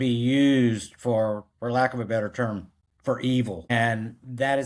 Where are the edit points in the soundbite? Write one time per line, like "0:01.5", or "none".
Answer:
0:03.7